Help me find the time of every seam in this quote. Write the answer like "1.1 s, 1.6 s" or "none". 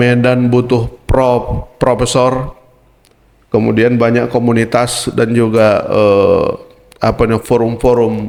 none